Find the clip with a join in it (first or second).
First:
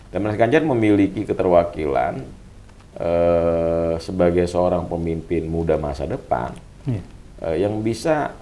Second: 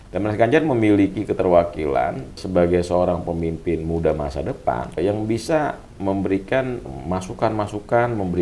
second